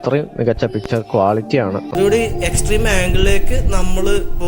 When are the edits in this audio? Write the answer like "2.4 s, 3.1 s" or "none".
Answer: 1.9 s